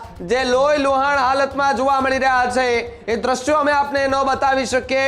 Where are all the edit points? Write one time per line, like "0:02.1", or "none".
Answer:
none